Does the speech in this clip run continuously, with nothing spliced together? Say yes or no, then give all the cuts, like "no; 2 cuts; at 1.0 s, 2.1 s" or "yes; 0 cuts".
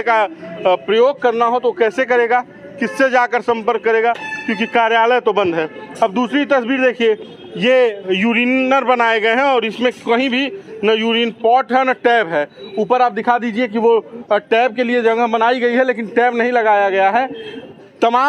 yes; 0 cuts